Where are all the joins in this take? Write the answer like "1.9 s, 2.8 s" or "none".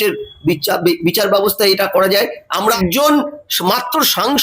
2.5 s